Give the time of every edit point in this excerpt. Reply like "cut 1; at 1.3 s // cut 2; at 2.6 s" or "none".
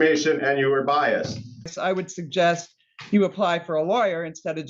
cut 1; at 1.7 s